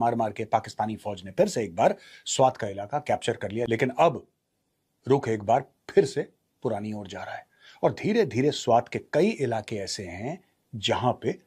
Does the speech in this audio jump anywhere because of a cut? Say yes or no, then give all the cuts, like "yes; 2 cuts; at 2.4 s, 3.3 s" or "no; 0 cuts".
no; 0 cuts